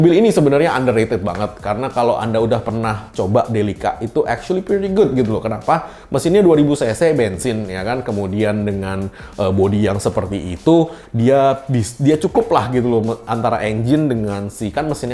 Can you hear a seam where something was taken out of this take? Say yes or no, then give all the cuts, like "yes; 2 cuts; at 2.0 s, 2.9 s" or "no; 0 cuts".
no; 0 cuts